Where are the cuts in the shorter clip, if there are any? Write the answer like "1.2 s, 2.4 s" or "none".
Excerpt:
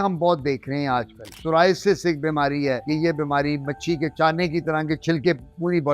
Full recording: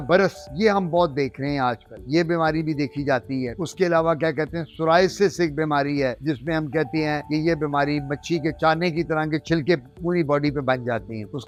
1.2 s, 2.8 s